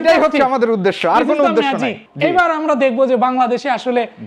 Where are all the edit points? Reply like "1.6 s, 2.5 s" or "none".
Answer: none